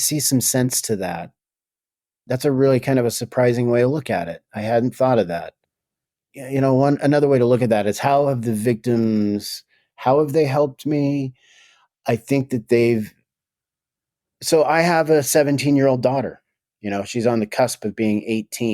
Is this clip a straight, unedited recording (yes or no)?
no